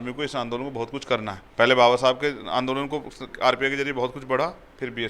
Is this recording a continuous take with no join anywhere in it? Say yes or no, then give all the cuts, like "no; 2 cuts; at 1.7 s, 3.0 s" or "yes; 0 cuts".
no; 1 cut; at 1.4 s